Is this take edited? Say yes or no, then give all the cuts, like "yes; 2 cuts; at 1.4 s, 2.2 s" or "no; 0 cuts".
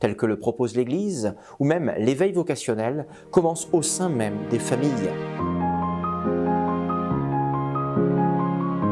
yes; 1 cut; at 5.2 s